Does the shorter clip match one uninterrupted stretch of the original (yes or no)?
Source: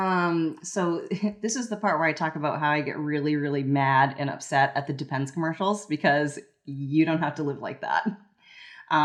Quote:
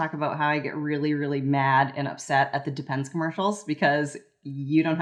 yes